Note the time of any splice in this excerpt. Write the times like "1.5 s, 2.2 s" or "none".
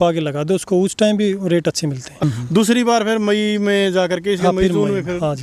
2.2 s